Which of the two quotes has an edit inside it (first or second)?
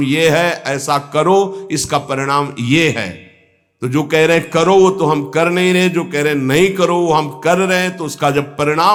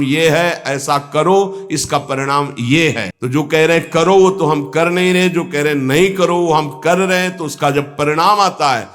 second